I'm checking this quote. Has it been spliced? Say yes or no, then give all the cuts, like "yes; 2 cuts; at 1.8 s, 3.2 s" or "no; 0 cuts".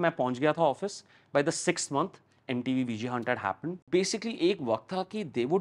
yes; 1 cut; at 3.8 s